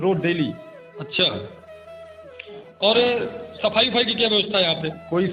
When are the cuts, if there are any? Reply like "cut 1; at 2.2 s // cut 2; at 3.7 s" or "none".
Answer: none